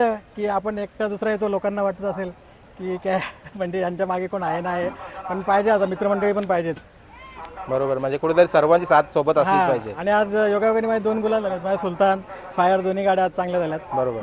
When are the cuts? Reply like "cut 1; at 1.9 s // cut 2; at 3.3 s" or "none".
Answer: none